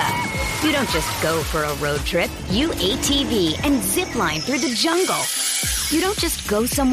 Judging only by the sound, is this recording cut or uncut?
uncut